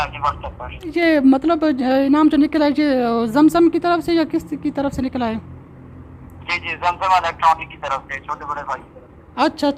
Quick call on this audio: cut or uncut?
cut